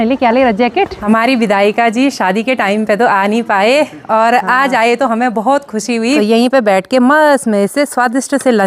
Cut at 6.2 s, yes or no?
yes